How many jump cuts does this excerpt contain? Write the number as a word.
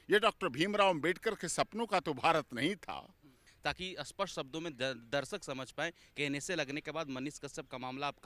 one